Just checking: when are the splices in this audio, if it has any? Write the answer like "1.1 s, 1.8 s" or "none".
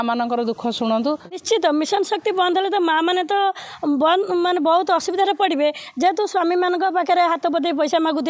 1.2 s